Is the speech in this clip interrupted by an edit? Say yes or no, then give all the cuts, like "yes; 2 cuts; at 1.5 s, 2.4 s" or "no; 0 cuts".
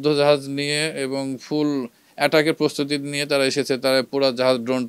no; 0 cuts